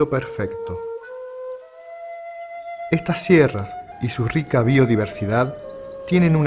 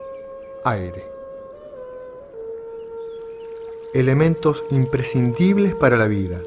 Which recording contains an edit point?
first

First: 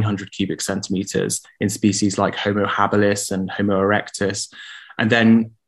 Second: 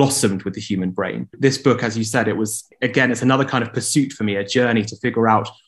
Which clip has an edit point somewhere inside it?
second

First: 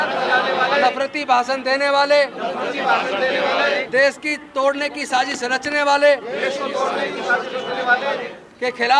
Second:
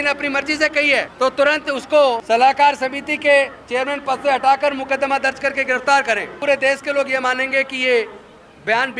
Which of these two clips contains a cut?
second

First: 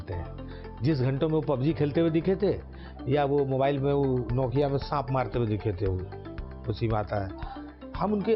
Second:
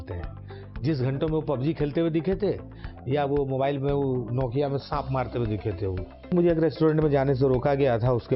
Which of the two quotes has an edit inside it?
second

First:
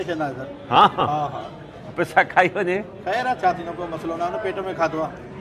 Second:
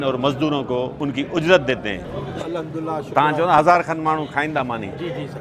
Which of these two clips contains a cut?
second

